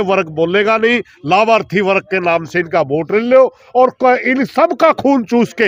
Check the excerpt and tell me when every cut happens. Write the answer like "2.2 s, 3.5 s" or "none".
none